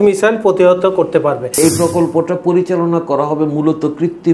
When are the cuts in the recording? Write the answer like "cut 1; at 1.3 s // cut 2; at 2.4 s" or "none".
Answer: cut 1; at 1.5 s